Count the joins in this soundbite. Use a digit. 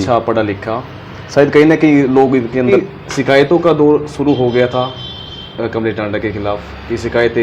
1